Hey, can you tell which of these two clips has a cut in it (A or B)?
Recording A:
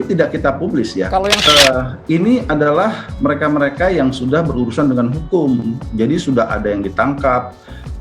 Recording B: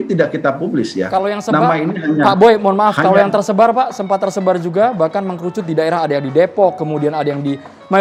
A